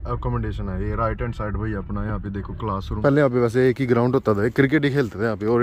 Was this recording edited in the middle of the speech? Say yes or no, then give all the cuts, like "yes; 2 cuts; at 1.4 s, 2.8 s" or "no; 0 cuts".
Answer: yes; 1 cut; at 2.9 s